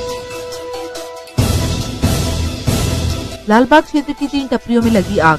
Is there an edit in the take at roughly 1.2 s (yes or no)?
yes